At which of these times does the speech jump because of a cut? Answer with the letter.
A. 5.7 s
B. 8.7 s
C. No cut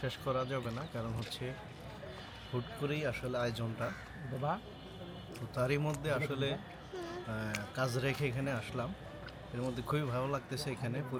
C